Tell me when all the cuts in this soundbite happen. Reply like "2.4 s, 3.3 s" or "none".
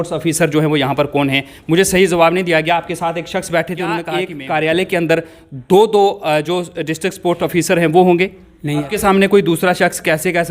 4.1 s, 8.9 s